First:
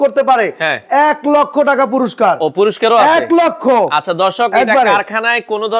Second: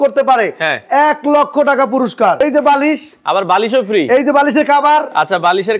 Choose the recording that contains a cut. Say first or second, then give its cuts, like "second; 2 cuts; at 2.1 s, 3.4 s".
second; 1 cut; at 2.4 s